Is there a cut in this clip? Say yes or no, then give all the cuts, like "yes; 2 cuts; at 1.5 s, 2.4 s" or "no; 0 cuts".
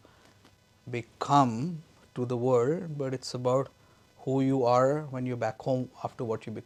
no; 0 cuts